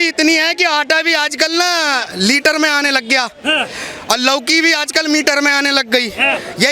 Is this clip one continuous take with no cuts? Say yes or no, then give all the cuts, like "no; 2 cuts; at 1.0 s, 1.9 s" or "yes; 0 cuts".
yes; 0 cuts